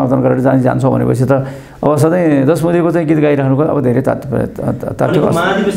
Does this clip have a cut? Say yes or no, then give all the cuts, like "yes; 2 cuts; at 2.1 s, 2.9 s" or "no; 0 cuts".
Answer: no; 0 cuts